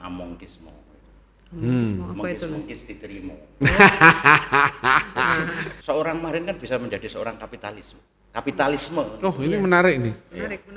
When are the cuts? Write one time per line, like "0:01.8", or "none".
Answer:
0:05.7